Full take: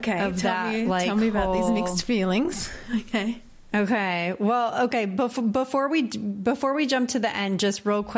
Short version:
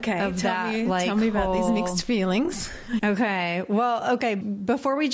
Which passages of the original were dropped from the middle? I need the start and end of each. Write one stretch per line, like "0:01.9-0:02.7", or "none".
0:03.0-0:03.7
0:05.1-0:06.2